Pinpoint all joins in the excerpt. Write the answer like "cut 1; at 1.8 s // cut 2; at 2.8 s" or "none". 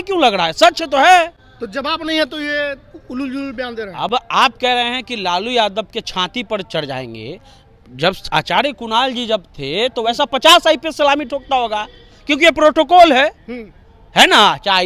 none